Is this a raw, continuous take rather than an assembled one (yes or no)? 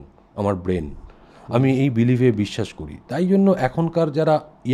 yes